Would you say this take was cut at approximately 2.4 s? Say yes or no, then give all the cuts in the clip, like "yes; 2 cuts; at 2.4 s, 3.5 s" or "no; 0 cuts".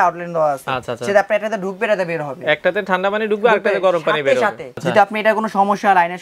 no; 1 cut; at 4.8 s